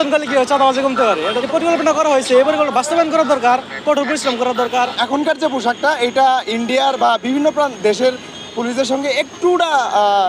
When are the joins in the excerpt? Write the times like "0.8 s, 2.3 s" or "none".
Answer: 1.4 s, 5.0 s

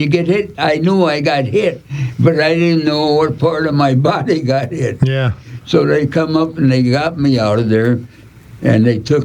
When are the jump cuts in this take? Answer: none

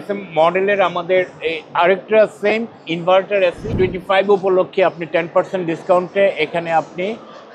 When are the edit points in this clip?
3.6 s

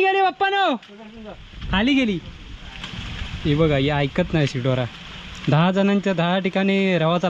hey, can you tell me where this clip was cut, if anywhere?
none

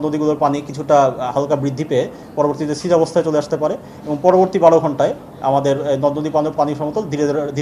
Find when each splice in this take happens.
none

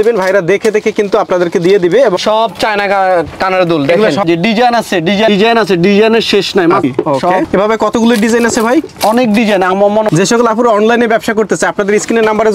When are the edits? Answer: 2.2 s, 4.2 s, 6.8 s

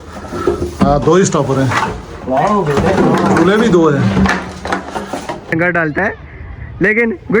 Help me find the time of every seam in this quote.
5.5 s

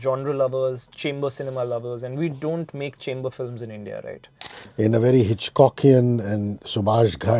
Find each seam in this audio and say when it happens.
4.6 s

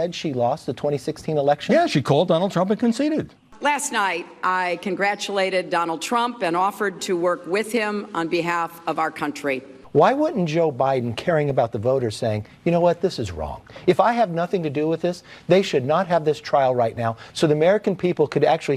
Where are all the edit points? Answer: 3.4 s, 9.7 s

